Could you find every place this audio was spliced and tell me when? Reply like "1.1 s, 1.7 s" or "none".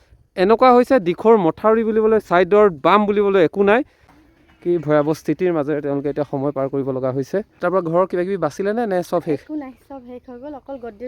4.1 s, 7.5 s